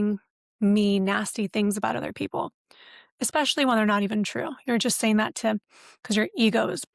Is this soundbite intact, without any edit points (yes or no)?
yes